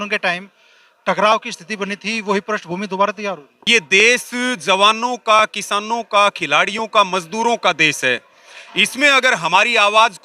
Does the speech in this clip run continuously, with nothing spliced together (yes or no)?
no